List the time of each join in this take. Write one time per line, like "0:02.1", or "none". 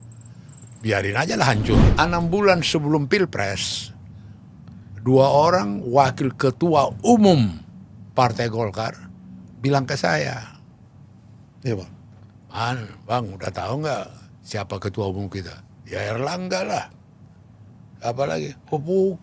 0:01.9